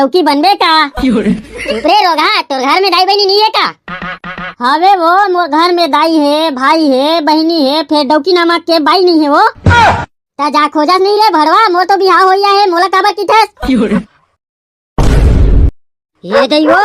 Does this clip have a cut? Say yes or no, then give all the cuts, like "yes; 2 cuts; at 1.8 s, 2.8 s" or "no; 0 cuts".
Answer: yes; 1 cut; at 14.2 s